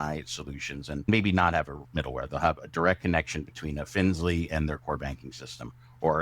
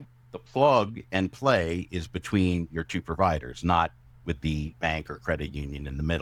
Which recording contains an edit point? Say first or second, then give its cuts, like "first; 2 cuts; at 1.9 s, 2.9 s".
first; 1 cut; at 1.1 s